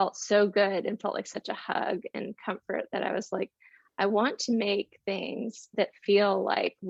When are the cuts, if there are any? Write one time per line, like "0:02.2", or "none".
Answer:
none